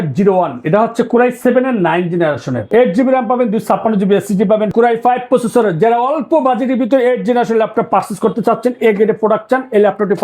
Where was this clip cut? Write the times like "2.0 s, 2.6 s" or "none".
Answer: 4.7 s